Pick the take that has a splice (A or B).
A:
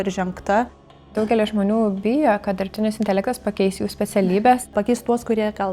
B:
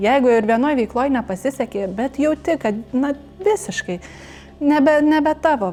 A